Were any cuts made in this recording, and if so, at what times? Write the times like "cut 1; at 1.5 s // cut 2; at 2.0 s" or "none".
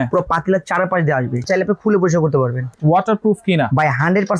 cut 1; at 1.4 s // cut 2; at 2.7 s